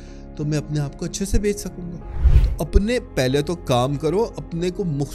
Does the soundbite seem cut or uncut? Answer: uncut